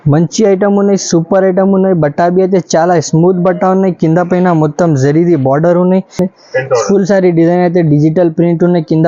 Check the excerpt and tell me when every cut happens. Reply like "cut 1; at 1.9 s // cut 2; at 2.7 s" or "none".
cut 1; at 6.3 s